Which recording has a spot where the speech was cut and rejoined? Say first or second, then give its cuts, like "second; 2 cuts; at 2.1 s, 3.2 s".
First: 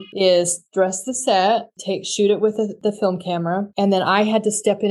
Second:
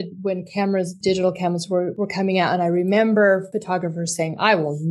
second; 3 cuts; at 0.9 s, 1.9 s, 3.5 s